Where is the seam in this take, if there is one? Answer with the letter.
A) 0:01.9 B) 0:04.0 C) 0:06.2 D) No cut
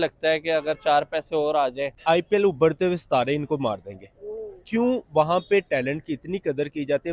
A